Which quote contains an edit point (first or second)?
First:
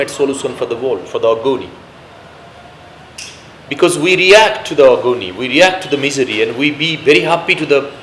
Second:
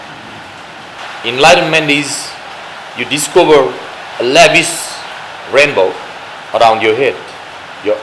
second